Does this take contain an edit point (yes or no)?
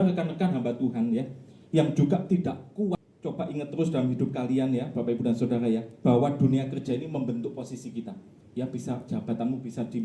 yes